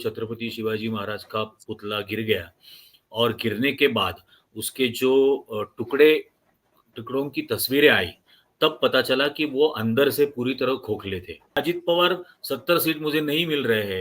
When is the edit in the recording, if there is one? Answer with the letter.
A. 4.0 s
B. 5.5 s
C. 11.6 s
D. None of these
C